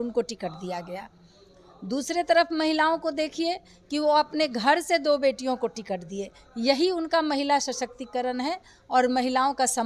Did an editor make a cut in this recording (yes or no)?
no